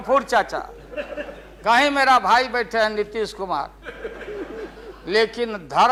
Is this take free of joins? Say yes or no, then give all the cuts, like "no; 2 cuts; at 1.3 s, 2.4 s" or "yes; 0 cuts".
yes; 0 cuts